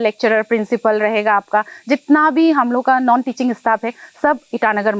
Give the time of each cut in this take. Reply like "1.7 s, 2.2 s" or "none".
none